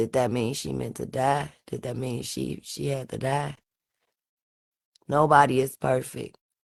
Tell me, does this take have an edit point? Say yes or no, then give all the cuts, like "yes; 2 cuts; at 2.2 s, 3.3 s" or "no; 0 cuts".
no; 0 cuts